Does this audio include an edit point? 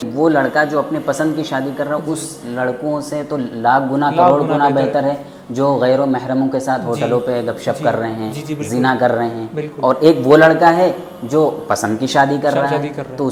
no; 0 cuts

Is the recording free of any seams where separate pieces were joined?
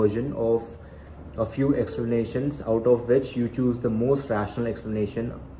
yes; 0 cuts

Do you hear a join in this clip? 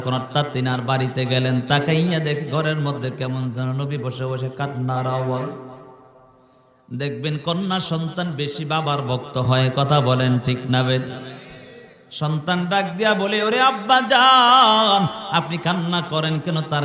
no; 0 cuts

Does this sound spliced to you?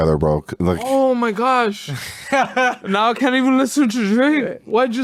no; 0 cuts

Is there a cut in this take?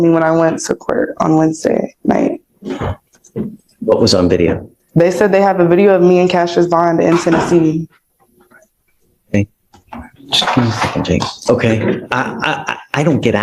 no; 0 cuts

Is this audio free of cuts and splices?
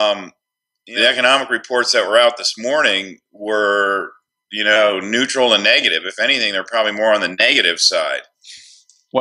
yes; 0 cuts

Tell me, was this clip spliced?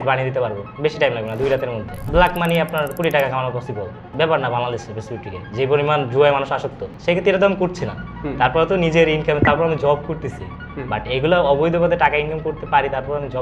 yes; 3 cuts; at 2.0 s, 4.1 s, 6.9 s

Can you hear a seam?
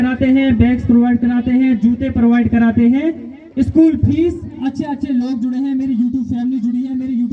yes; 1 cut; at 4.5 s

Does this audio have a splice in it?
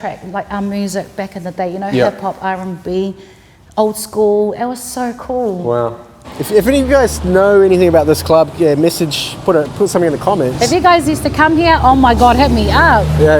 no; 0 cuts

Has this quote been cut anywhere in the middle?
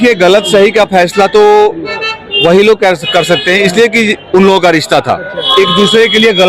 yes; 1 cut; at 5.4 s

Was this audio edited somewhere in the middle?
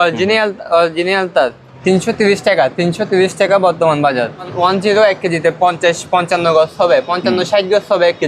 yes; 2 cuts; at 1.7 s, 4.5 s

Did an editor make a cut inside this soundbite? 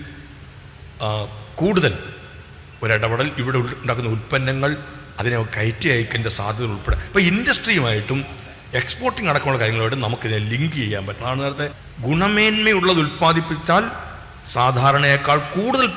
yes; 1 cut; at 11.9 s

